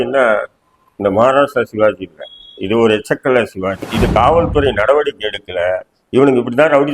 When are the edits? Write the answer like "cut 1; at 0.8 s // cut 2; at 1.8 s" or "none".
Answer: cut 1; at 3.9 s